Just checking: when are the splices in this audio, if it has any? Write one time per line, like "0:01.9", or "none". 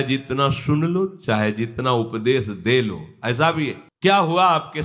0:03.8